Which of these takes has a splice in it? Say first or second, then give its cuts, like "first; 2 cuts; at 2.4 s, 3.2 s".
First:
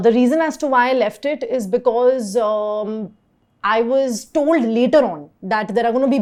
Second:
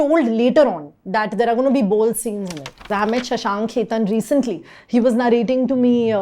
second; 1 cut; at 2.9 s